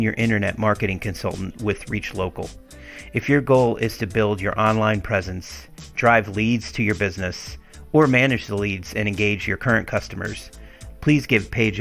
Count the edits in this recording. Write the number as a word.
zero